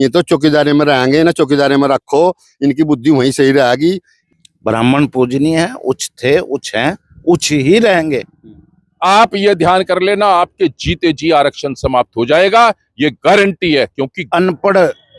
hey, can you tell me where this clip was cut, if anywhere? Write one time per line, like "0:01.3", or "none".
0:04.0
0:08.9
0:14.2